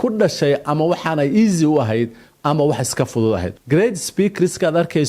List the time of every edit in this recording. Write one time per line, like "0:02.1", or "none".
0:03.5